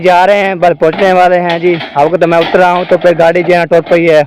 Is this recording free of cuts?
yes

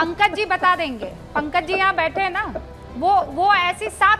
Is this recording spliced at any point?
no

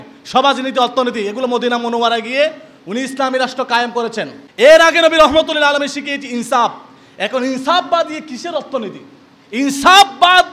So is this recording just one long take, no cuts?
no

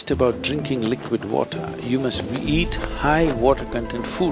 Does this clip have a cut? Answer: no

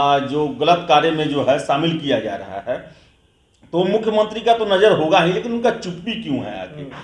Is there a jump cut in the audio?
no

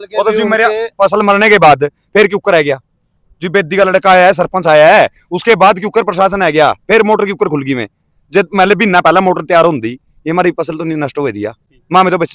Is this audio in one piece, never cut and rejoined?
yes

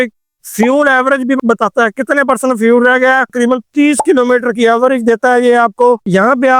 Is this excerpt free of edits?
no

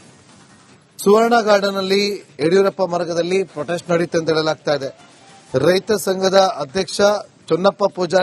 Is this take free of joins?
no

